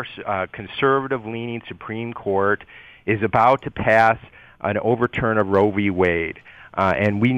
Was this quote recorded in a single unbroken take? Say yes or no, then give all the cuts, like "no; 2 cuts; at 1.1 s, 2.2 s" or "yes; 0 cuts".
yes; 0 cuts